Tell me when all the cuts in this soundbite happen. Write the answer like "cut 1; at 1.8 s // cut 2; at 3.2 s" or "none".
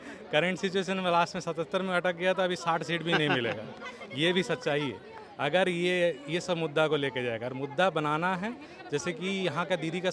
none